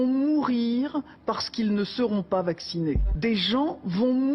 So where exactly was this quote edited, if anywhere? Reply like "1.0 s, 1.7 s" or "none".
3.1 s